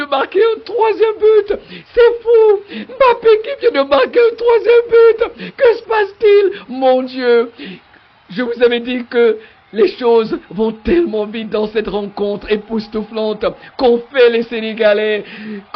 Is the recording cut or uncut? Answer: uncut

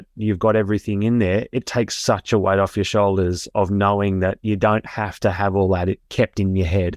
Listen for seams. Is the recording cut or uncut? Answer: uncut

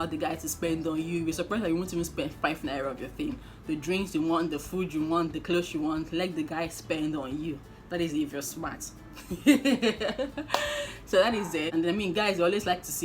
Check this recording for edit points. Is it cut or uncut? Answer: cut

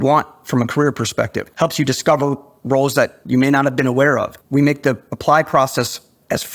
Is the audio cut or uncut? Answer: cut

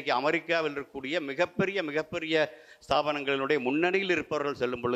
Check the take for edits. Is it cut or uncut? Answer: uncut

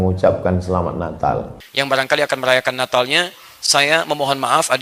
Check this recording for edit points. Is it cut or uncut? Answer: cut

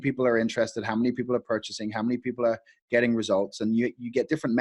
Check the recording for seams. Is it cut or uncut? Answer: uncut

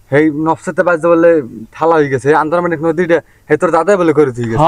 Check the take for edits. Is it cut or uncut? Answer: uncut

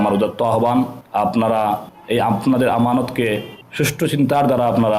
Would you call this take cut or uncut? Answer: cut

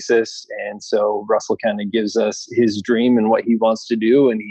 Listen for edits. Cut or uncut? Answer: uncut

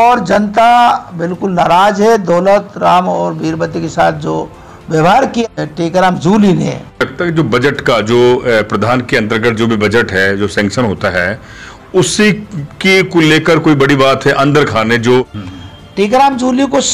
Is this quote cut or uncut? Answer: cut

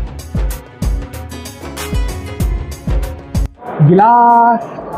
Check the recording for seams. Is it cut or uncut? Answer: cut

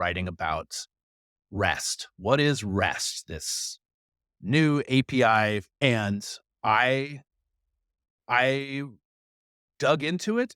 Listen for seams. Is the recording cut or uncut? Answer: cut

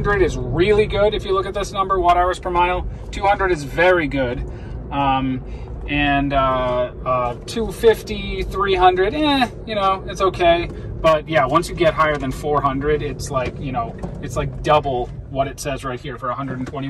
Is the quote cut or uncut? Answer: uncut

